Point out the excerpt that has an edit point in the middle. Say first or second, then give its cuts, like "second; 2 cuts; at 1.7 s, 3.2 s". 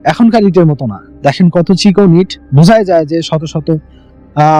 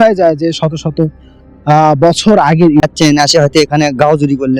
second; 1 cut; at 2.8 s